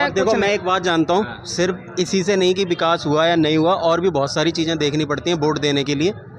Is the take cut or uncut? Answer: uncut